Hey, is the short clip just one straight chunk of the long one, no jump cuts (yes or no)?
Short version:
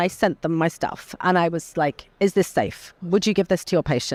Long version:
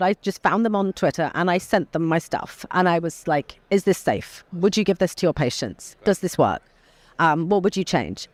yes